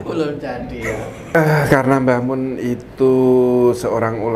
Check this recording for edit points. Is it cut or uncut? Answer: cut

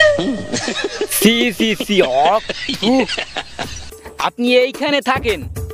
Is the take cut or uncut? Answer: uncut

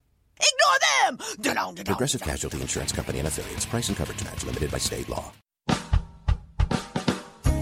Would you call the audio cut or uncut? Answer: cut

